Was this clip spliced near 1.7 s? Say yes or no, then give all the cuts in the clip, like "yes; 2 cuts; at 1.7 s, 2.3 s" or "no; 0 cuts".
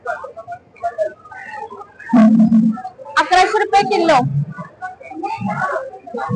no; 0 cuts